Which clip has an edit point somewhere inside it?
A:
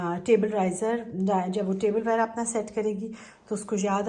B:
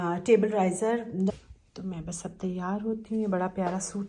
B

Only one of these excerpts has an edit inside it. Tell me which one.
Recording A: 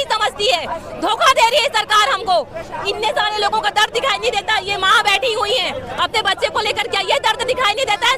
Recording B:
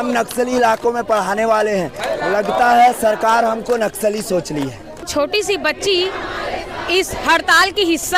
B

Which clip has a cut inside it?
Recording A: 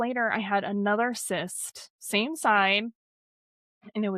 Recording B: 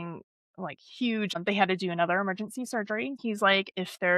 B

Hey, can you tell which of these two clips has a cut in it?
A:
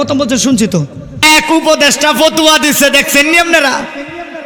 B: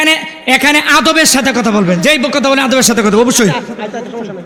A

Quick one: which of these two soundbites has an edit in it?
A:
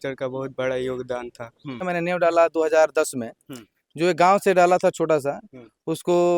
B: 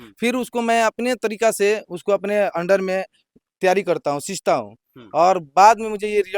A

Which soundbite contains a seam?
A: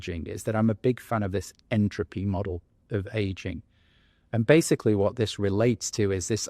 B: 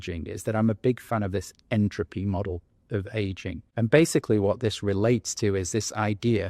B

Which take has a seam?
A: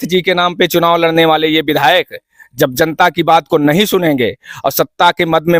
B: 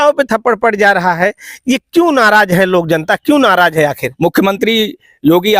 B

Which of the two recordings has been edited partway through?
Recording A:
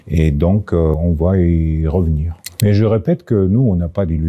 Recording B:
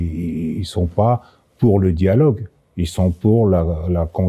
A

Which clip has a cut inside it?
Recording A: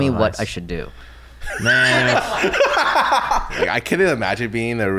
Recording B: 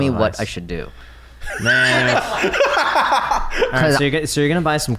A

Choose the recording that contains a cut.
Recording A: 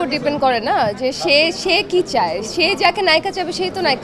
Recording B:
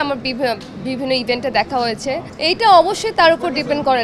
B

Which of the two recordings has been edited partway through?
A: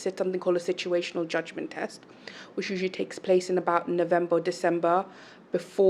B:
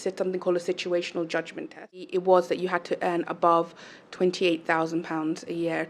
B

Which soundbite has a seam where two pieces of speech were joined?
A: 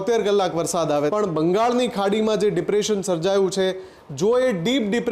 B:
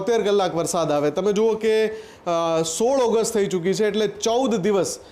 A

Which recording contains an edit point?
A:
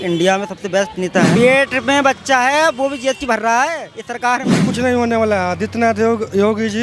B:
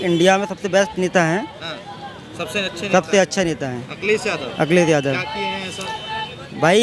A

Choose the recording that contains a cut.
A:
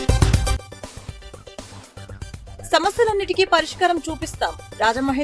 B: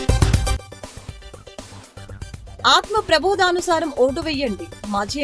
A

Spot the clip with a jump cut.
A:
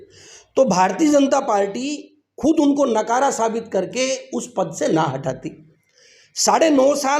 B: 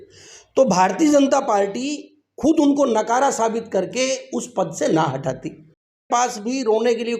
B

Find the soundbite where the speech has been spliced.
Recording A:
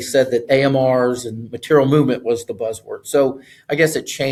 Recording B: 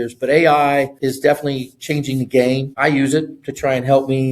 B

